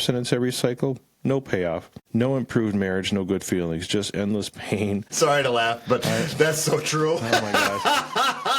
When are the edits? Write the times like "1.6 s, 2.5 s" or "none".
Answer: 1.9 s, 5.1 s